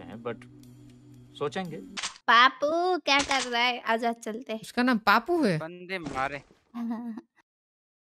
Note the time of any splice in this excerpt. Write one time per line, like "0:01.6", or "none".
none